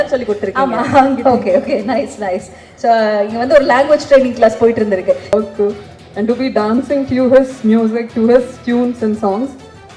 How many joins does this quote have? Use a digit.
1